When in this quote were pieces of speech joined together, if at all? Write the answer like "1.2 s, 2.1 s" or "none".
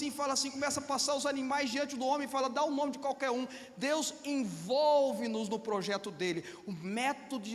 none